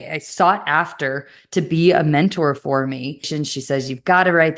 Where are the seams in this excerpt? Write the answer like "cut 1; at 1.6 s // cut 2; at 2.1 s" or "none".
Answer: cut 1; at 3.4 s